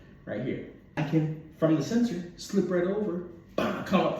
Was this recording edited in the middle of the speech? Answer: yes; 1 cut; at 1.0 s

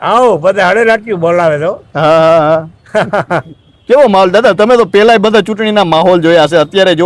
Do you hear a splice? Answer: no; 0 cuts

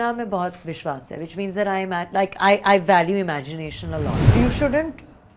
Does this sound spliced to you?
yes; 1 cut; at 4.2 s

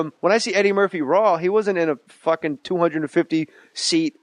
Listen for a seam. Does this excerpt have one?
no; 0 cuts

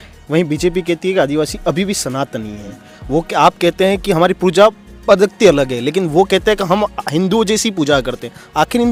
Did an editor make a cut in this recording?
no; 0 cuts

